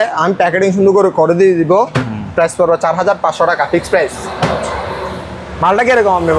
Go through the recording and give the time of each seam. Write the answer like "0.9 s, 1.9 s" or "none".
none